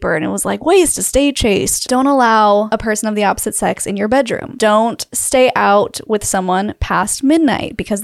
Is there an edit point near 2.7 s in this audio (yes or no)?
yes